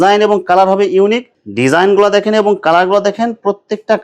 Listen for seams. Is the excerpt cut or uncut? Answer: cut